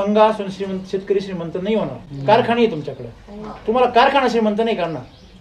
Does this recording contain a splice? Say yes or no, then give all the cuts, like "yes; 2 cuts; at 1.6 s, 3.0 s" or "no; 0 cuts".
no; 0 cuts